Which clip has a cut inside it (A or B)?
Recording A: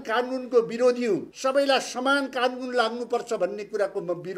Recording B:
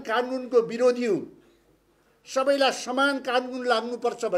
A